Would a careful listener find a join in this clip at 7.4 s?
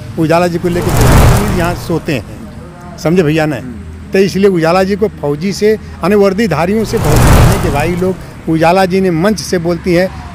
yes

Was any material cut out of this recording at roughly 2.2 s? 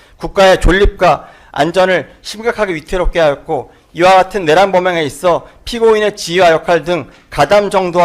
no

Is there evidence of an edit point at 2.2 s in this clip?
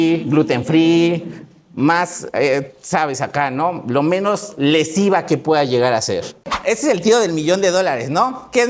no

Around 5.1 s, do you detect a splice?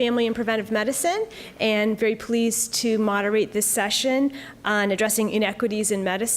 yes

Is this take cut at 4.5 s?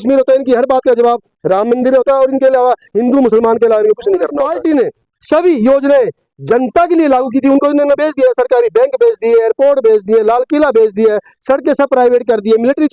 yes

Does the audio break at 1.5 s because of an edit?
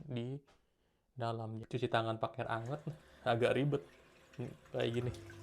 yes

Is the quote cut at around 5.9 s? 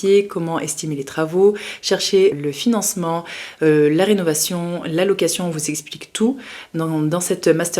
no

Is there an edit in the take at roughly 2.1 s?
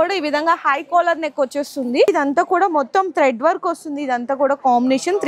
yes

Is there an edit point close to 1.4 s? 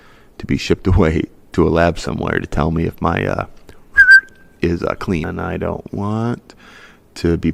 no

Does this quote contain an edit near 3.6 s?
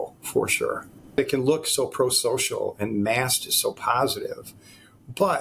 no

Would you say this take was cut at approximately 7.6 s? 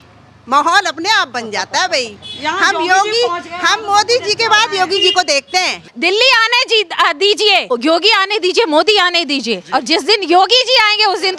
yes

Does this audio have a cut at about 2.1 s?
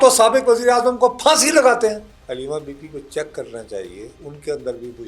yes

